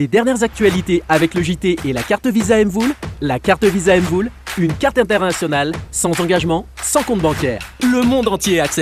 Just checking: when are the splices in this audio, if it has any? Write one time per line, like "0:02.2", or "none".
none